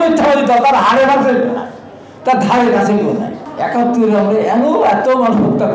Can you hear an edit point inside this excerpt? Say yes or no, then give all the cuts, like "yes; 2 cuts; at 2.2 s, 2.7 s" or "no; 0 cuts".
yes; 1 cut; at 3.4 s